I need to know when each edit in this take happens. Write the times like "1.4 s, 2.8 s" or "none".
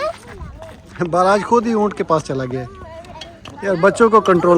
1.0 s